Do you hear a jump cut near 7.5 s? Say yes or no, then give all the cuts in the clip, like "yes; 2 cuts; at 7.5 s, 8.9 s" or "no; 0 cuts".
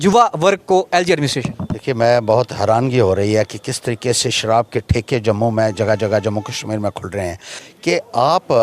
yes; 1 cut; at 7.5 s